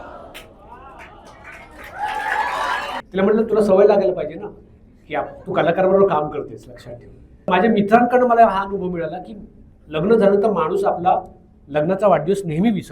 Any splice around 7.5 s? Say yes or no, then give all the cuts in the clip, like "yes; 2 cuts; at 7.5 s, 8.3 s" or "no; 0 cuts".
yes; 2 cuts; at 3.0 s, 7.5 s